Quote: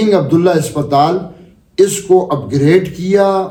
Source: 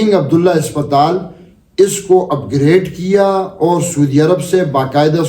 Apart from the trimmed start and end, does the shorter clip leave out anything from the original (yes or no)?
no